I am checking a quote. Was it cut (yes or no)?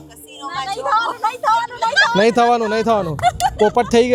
no